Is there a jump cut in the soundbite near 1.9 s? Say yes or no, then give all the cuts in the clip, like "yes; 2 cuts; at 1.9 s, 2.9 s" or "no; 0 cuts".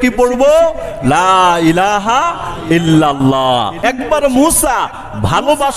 no; 1 cut; at 3.7 s